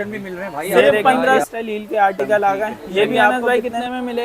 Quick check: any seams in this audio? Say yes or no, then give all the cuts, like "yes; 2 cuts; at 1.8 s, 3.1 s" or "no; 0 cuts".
yes; 2 cuts; at 1.4 s, 3.3 s